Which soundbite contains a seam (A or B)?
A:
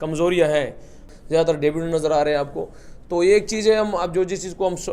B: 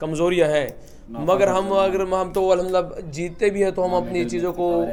A